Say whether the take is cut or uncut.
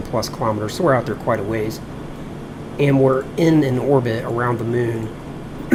uncut